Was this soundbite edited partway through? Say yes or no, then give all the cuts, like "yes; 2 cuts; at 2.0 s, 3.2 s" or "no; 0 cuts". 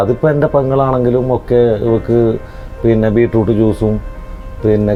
no; 0 cuts